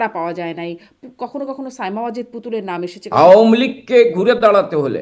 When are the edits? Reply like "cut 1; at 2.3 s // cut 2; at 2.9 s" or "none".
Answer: cut 1; at 3.0 s